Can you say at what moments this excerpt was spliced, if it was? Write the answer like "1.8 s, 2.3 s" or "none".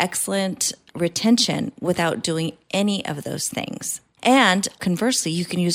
4.8 s